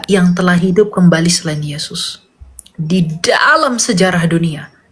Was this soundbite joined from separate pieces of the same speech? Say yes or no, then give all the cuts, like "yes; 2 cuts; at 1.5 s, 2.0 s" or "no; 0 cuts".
no; 0 cuts